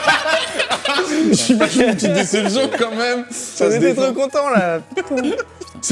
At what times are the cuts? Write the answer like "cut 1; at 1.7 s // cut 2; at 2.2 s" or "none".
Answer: cut 1; at 1.3 s // cut 2; at 3.5 s